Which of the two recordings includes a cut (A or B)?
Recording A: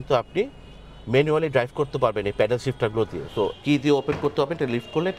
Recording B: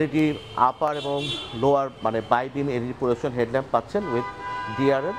A